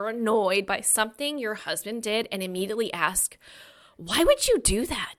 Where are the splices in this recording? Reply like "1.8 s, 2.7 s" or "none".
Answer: none

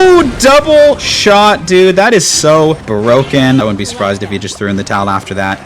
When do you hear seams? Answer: 2.8 s, 3.6 s

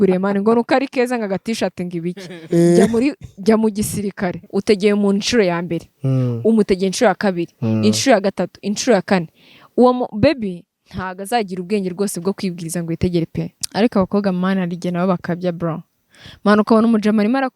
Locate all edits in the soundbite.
4.4 s, 13.6 s

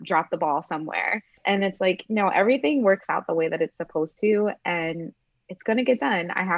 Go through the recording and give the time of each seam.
1.3 s

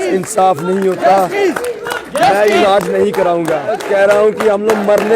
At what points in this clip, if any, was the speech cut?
3.7 s

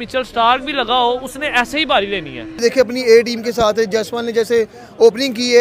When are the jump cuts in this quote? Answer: 2.6 s

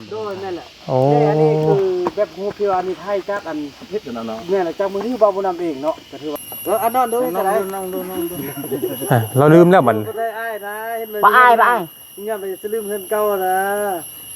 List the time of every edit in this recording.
6.3 s

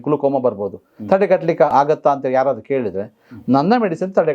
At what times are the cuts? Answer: 1.7 s

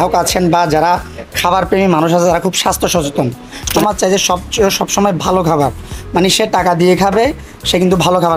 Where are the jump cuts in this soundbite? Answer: 3.7 s

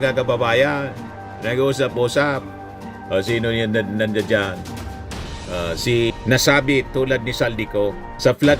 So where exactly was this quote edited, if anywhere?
6.2 s

